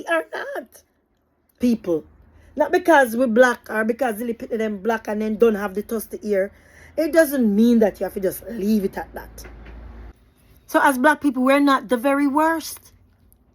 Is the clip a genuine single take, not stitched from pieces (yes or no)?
no